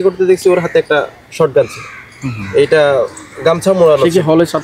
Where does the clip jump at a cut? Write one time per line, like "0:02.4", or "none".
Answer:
none